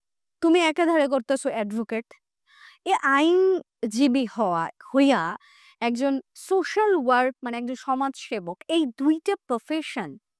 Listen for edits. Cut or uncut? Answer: uncut